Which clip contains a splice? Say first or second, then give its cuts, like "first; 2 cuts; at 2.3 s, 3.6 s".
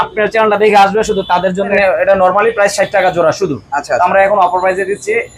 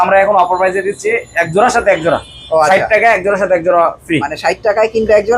first; 1 cut; at 1.7 s